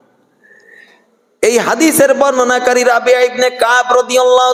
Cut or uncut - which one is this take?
uncut